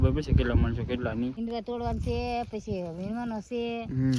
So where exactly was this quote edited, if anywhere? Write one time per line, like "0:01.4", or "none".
0:01.4